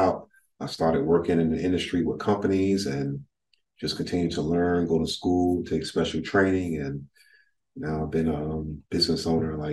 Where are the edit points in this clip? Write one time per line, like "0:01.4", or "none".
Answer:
none